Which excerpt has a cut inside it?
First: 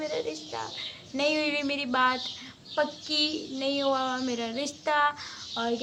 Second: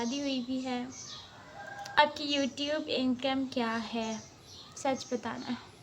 second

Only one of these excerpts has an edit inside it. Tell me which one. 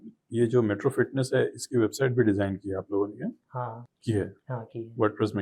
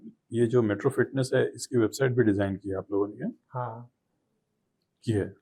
first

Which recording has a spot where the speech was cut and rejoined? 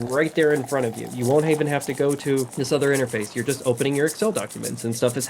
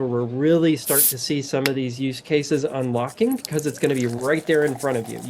first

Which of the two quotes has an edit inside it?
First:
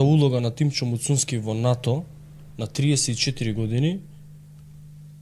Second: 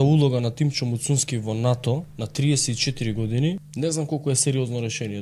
second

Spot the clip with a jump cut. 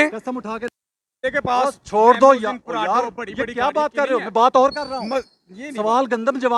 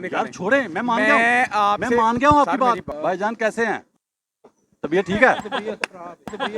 second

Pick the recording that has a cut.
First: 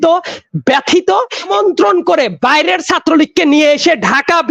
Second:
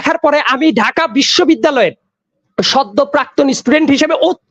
first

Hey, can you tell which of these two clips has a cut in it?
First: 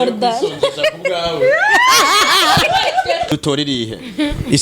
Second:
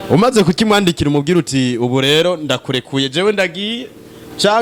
first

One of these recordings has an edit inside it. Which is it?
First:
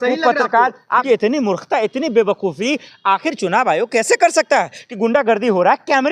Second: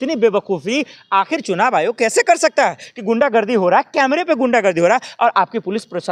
first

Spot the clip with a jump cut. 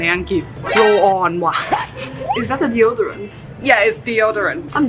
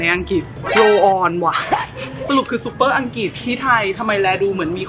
second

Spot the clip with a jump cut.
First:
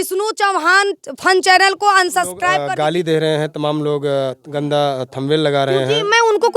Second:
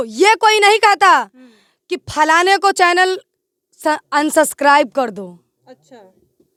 first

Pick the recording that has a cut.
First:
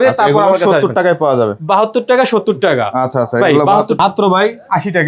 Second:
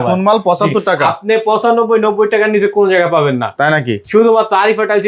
first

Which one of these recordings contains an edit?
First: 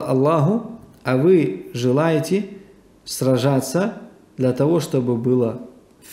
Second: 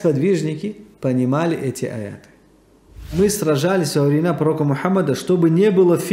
second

